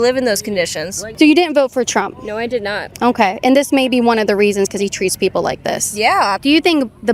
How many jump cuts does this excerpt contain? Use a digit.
2